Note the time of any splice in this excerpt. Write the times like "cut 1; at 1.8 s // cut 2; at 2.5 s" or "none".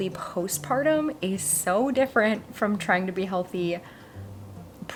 none